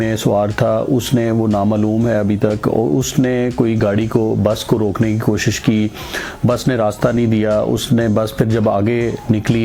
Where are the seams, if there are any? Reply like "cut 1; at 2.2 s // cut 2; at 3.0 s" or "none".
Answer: none

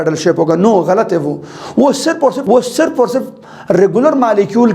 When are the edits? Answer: cut 1; at 2.4 s

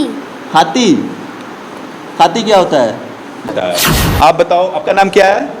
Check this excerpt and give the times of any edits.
cut 1; at 3.5 s

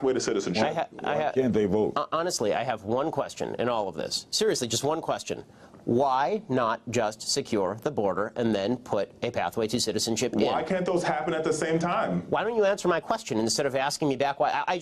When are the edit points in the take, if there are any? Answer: none

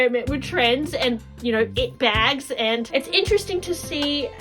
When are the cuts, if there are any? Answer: cut 1; at 2.9 s

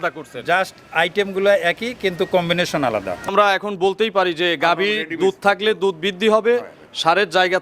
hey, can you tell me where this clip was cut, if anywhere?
cut 1; at 3.3 s

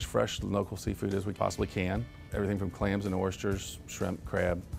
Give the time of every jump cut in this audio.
cut 1; at 1.3 s // cut 2; at 2.2 s

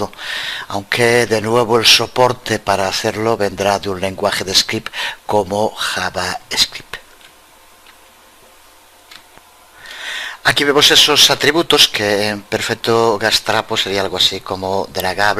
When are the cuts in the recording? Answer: cut 1; at 1.3 s

